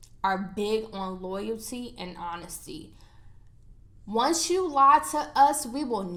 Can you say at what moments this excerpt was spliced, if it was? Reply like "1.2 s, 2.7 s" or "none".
none

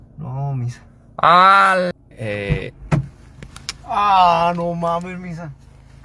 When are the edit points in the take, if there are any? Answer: 1.9 s

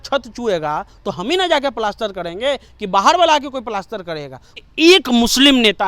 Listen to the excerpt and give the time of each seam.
4.7 s

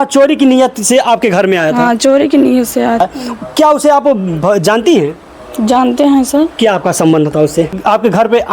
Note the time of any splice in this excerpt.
3.0 s, 7.7 s

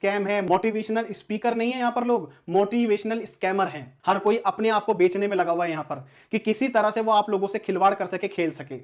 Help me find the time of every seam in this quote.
3.9 s

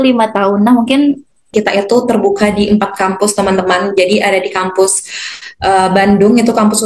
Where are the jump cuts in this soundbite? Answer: 1.5 s

